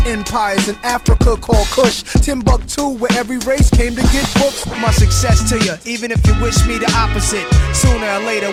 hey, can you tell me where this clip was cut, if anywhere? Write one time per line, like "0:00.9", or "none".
none